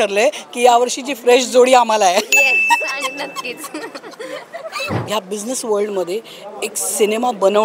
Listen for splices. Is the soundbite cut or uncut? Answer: cut